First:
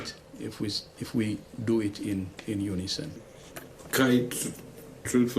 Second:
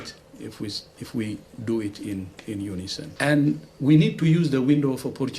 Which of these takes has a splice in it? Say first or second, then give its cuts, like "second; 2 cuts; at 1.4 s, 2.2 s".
second; 1 cut; at 3.1 s